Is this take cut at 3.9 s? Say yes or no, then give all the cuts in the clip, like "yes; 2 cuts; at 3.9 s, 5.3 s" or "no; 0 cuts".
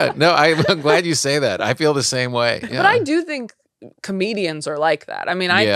no; 1 cut; at 2.6 s